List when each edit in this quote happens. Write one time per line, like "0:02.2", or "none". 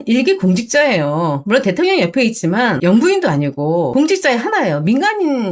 none